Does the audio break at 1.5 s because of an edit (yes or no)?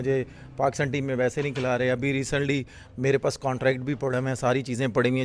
no